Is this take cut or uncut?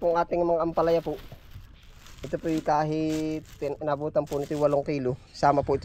uncut